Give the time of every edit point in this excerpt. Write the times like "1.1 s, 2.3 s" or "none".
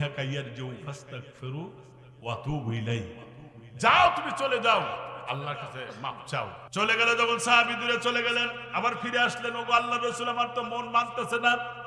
6.6 s